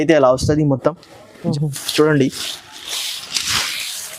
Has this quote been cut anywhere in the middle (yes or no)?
yes